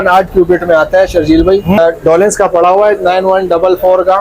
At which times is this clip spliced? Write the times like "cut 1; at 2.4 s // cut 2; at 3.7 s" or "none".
cut 1; at 1.8 s